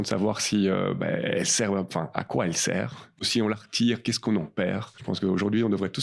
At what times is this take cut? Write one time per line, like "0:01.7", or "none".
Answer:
0:04.9